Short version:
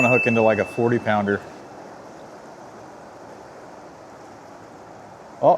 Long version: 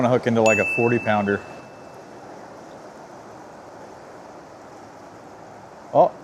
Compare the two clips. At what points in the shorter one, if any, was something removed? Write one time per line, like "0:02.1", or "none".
0:01.4